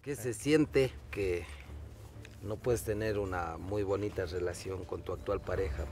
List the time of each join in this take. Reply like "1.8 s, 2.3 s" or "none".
1.1 s

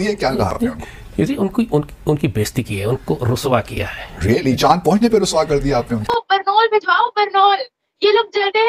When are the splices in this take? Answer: 6.0 s

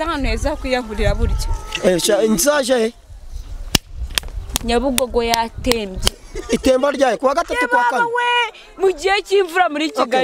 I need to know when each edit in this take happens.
none

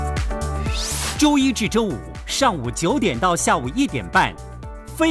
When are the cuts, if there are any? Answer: 1.1 s, 2.0 s

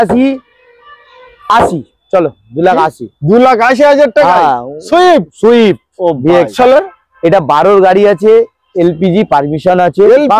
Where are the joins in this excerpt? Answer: 6.5 s

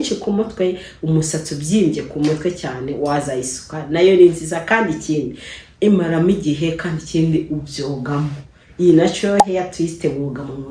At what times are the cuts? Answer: none

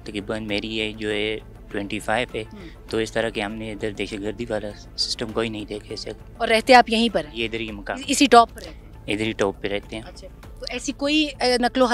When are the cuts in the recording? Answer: none

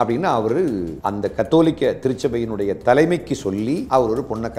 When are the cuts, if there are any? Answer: 0.9 s, 3.8 s

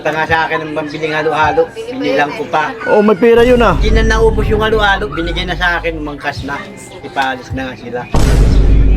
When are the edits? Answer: 8.1 s

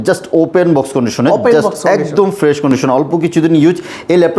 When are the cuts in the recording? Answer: none

